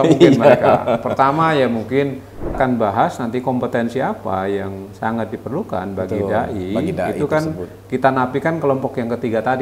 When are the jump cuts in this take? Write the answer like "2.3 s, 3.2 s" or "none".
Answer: 2.6 s

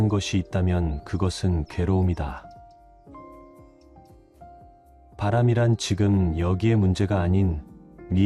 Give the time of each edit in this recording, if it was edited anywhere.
none

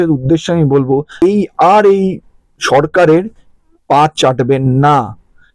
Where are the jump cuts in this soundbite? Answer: 1.2 s

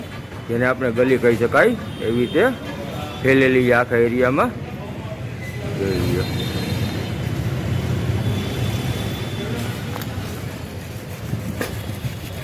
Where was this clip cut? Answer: none

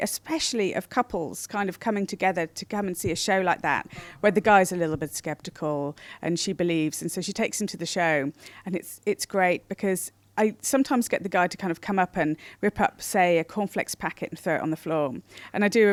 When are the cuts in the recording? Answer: none

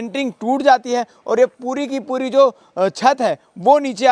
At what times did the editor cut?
none

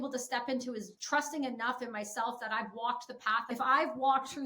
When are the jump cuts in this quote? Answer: 0.9 s, 3.5 s

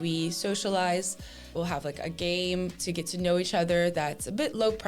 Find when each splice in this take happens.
1.5 s

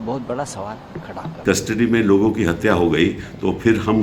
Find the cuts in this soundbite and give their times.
none

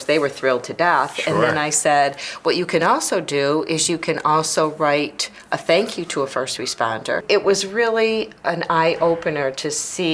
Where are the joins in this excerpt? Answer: 7.2 s

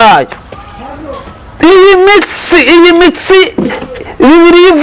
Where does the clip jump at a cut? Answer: none

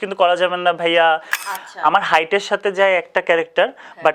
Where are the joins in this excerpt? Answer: 1.4 s

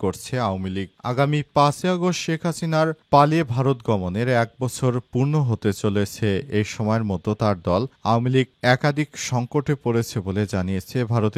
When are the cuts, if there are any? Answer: none

